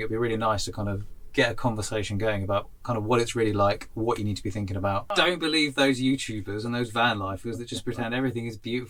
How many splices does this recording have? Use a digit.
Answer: 1